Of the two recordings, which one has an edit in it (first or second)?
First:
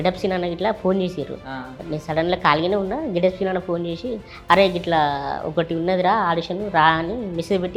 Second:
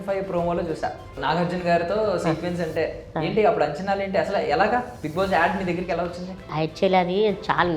second